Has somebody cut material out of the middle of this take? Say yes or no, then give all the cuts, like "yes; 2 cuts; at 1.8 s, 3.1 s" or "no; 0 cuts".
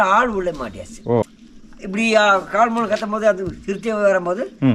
yes; 1 cut; at 1.3 s